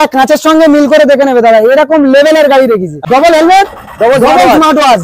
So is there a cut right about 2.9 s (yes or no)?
yes